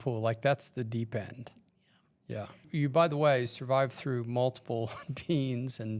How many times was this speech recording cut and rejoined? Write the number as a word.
one